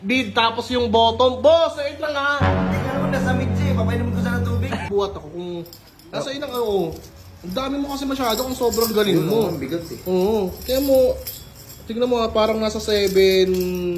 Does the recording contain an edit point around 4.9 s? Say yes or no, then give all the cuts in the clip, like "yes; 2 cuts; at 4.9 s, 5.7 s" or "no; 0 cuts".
yes; 1 cut; at 4.9 s